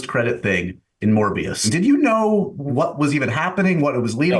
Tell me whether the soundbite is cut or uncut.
cut